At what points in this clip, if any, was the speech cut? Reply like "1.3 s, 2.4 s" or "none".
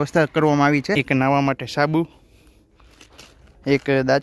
1.0 s